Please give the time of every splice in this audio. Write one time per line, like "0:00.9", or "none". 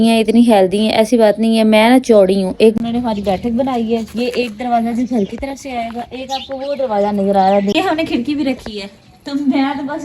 0:02.7
0:07.7